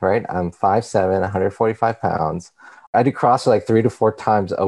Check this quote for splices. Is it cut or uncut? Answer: cut